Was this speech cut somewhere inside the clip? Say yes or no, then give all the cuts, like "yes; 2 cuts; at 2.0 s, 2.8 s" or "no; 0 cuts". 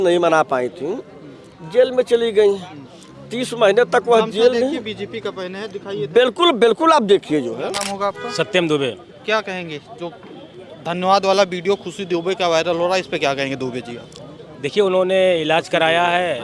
yes; 1 cut; at 7.6 s